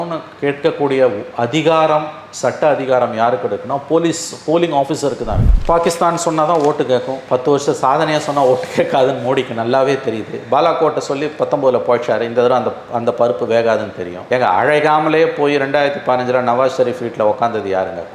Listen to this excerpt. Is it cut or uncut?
cut